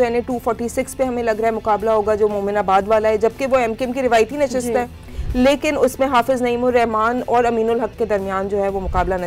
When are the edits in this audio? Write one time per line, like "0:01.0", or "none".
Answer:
none